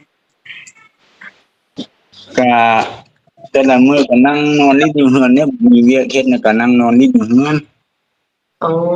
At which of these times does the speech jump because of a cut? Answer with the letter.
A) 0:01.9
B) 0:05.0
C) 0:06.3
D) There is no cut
D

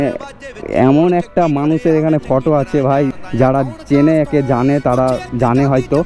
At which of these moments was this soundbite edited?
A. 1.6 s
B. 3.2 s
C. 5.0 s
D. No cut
B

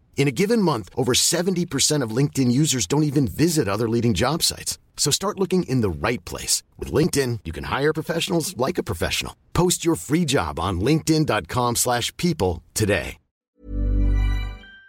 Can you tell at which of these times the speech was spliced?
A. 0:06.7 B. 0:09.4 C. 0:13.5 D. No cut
C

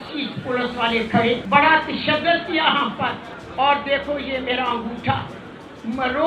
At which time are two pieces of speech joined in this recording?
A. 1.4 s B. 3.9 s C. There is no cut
A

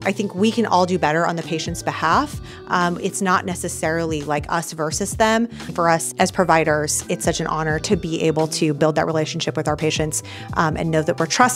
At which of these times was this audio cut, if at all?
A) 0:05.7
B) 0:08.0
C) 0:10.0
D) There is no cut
A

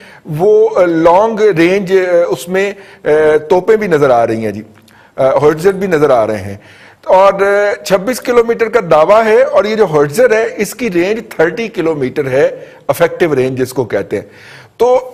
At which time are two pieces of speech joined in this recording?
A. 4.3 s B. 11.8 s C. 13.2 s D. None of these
D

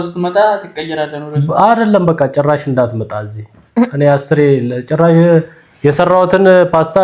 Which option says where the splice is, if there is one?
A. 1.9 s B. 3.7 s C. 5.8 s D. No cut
D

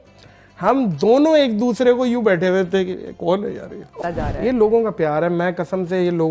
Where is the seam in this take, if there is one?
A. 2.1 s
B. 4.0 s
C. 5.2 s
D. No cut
B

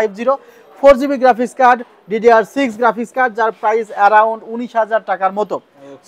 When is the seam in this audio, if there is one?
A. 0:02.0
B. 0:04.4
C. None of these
C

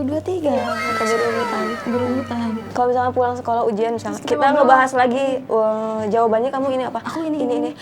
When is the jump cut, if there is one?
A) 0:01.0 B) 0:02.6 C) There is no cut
B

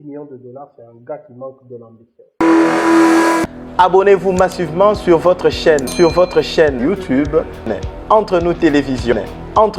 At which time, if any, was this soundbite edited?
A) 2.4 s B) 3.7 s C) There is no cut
A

